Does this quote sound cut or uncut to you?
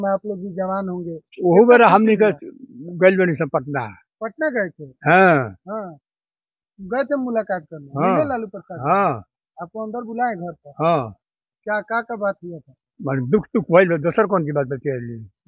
uncut